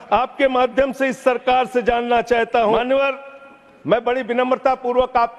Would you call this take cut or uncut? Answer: cut